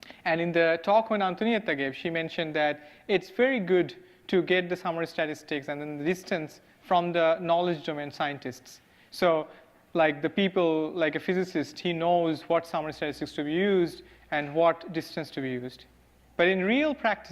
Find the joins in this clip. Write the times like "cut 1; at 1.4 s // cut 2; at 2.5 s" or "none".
cut 1; at 5.6 s

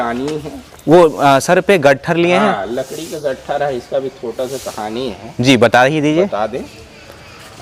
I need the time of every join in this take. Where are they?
none

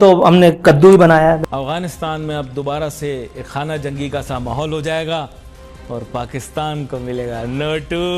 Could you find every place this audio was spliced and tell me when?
cut 1; at 1.4 s

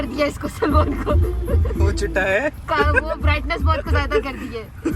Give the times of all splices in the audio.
none

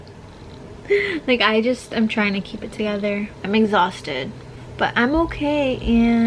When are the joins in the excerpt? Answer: cut 1; at 3.3 s // cut 2; at 4.6 s

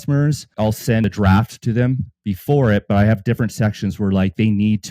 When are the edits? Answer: cut 1; at 1.0 s

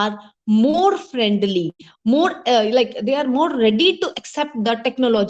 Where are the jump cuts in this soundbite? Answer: none

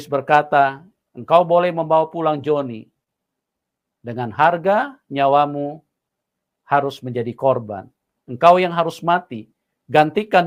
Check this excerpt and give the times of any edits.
none

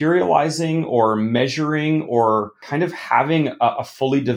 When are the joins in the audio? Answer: cut 1; at 2.6 s

